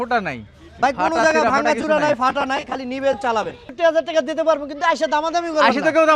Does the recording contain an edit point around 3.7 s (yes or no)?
yes